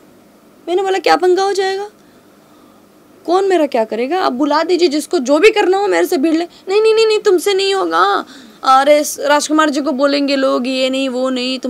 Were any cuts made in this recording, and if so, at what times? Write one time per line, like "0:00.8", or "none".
none